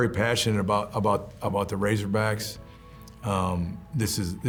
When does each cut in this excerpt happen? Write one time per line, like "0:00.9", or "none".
none